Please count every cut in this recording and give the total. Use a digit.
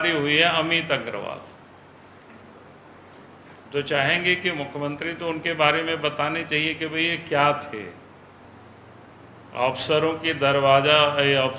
1